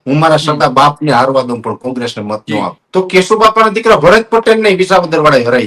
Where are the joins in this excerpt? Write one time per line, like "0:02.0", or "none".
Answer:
0:02.8